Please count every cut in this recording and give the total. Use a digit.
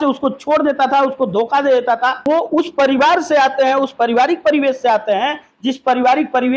1